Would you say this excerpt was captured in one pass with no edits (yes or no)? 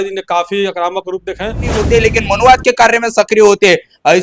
no